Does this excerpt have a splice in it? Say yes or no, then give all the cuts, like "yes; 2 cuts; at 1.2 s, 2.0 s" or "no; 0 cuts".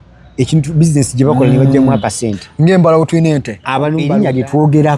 yes; 1 cut; at 4.0 s